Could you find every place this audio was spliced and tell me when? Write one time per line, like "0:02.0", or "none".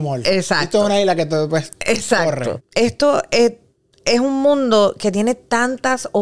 0:02.6